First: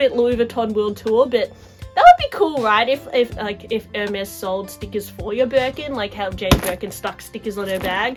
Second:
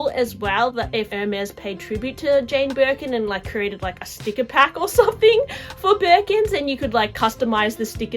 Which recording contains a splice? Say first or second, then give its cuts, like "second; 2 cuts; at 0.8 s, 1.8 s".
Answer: second; 1 cut; at 1.1 s